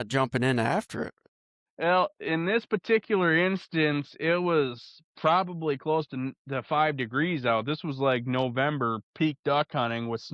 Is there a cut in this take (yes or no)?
yes